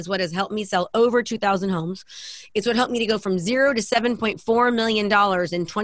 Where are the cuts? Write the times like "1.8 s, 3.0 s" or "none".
none

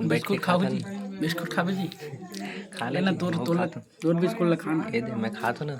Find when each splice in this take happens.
none

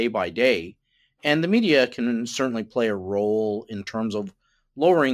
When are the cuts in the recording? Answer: none

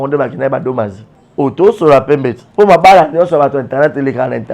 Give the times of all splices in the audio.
2.4 s

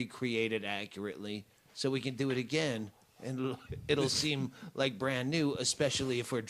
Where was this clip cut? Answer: 2.6 s

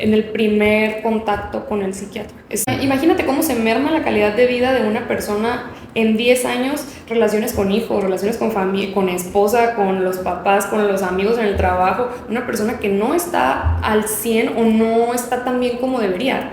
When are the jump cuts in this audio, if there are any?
2.7 s

